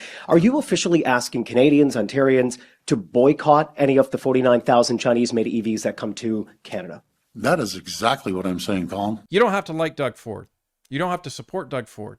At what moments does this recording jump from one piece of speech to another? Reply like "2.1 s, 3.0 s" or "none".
9.2 s